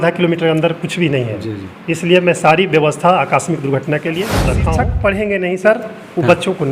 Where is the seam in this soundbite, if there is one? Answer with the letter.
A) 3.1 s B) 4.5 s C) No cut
B